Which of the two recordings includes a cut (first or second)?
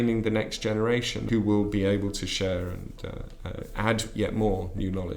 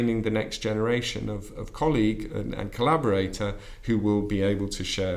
first